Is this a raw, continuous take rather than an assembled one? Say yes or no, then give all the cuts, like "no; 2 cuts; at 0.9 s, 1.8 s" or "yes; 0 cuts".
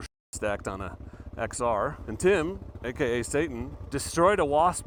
yes; 0 cuts